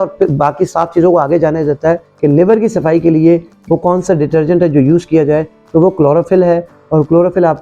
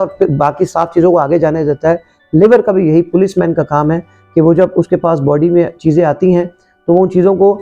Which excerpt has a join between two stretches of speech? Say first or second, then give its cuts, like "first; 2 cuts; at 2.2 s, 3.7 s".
first; 1 cut; at 2.1 s